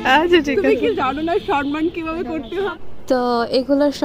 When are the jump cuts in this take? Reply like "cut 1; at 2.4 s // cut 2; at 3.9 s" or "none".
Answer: cut 1; at 2.7 s